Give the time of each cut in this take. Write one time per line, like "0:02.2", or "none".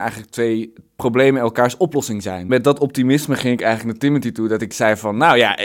0:01.0
0:02.4

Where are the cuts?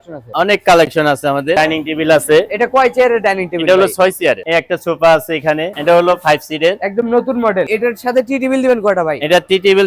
0:01.6
0:04.4
0:05.7
0:07.7

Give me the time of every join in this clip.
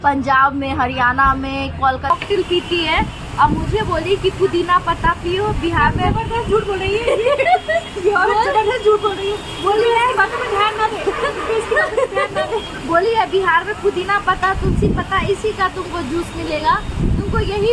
0:02.1

